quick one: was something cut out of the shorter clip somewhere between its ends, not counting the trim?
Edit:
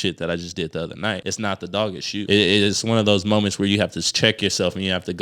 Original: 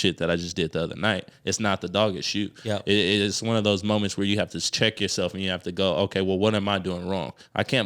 yes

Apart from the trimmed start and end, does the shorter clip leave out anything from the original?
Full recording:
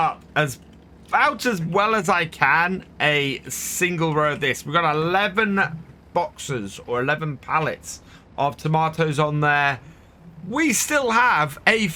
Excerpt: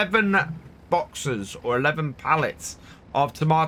no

